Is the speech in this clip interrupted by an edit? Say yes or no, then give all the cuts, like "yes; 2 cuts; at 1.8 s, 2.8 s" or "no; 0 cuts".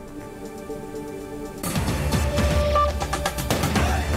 no; 0 cuts